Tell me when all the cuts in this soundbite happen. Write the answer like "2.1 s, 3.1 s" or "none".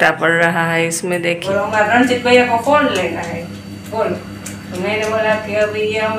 1.4 s